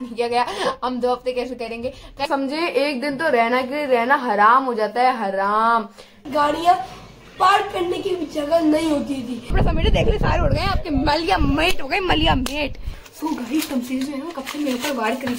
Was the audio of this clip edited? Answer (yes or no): yes